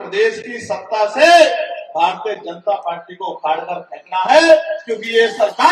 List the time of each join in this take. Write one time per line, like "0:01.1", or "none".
none